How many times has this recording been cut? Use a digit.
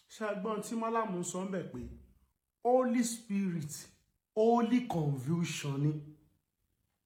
0